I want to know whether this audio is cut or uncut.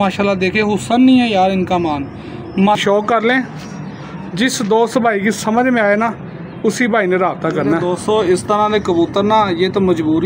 cut